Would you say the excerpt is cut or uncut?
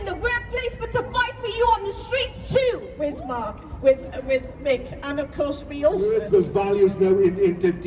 cut